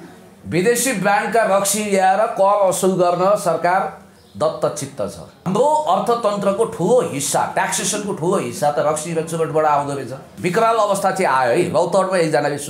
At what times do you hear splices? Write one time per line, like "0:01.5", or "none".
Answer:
0:05.4
0:10.3